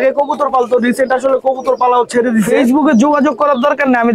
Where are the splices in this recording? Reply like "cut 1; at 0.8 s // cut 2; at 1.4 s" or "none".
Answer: cut 1; at 2.6 s